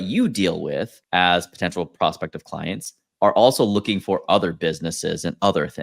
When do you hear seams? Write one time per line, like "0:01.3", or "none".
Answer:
0:01.0